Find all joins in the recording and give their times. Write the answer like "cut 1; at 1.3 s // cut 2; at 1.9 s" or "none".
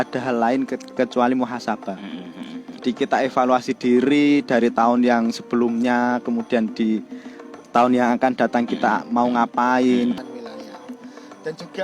cut 1; at 10.2 s

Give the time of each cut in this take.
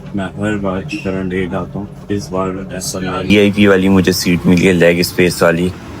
cut 1; at 3.3 s

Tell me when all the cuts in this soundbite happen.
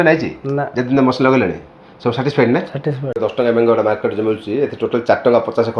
cut 1; at 3.2 s

